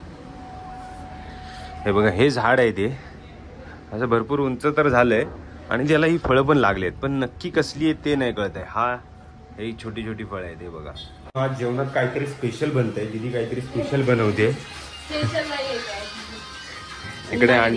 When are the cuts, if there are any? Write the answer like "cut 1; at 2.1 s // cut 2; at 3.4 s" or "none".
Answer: cut 1; at 11.4 s